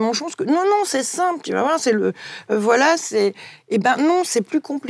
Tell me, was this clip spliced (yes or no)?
no